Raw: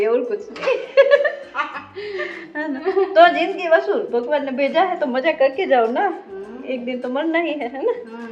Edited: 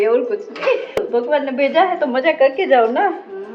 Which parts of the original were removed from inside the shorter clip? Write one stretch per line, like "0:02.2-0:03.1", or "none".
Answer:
0:00.9-0:03.9